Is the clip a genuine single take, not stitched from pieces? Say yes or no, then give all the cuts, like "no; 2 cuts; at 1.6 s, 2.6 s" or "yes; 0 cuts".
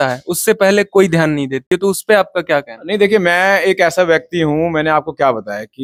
yes; 0 cuts